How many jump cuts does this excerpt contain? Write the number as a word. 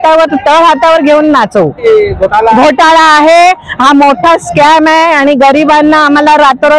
one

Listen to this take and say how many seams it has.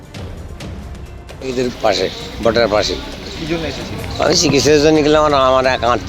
zero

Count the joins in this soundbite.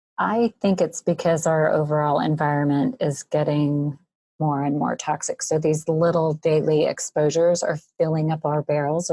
zero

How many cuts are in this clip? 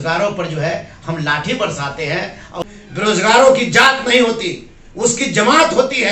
one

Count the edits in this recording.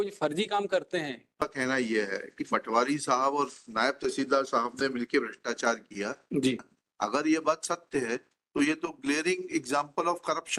two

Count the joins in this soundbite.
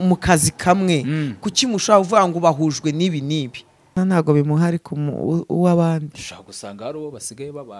one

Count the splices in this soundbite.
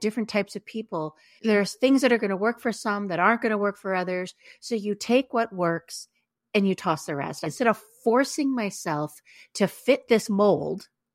two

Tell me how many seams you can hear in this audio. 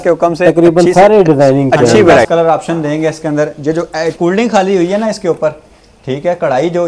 one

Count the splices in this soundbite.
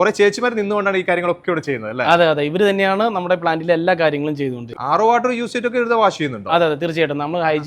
one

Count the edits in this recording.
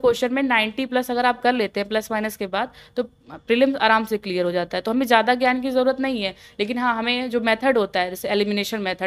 zero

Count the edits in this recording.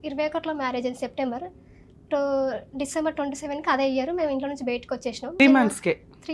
one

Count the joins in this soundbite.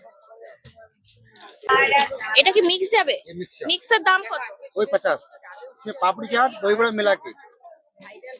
one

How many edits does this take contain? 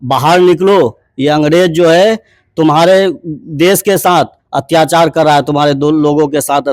zero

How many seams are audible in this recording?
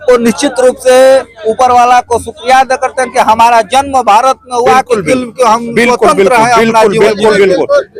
zero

